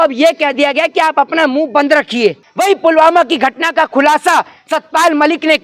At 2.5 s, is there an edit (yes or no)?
yes